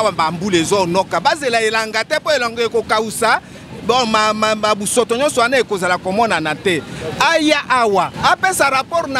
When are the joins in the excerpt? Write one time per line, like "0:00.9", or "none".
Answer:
0:08.1